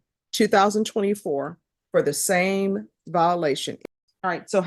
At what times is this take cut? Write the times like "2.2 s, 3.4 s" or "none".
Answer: 3.7 s

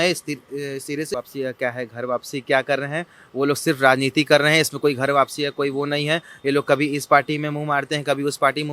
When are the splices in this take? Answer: 1.1 s

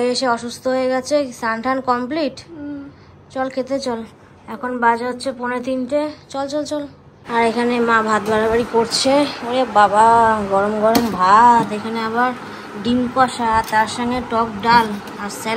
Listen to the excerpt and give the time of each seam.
none

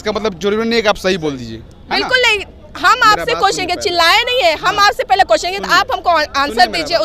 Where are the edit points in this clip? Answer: none

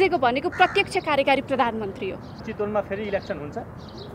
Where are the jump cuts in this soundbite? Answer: 2.5 s

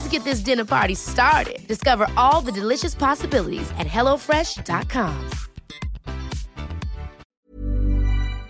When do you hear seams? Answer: 7.2 s

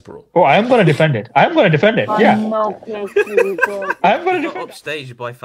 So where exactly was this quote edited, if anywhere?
4.5 s

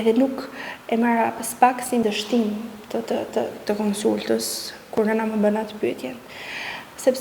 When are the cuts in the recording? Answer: 2.0 s

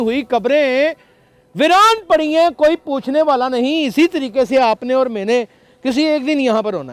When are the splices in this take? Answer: none

